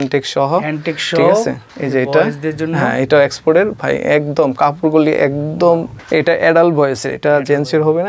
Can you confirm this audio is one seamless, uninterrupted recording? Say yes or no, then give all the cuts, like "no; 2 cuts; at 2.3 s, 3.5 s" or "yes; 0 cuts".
no; 2 cuts; at 1.7 s, 6.0 s